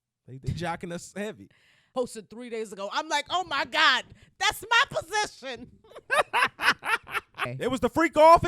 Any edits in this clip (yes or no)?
yes